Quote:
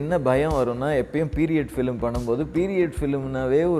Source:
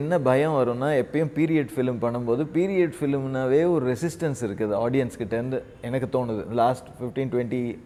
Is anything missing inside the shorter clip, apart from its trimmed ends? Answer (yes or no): no